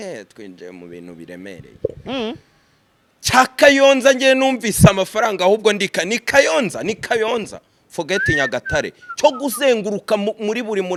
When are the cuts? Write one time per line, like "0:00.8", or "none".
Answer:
none